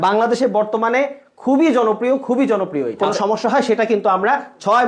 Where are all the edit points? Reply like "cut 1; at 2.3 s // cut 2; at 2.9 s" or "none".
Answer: cut 1; at 3.0 s